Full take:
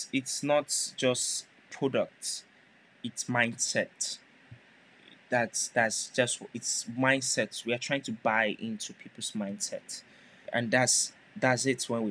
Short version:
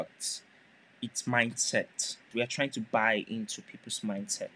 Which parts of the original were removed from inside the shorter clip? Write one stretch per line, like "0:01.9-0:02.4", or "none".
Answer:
0:04.3-0:07.6